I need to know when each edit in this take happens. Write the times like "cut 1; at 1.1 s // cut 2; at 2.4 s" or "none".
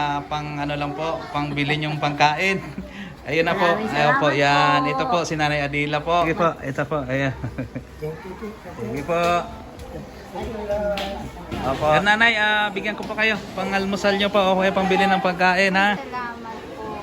cut 1; at 6.3 s // cut 2; at 12.0 s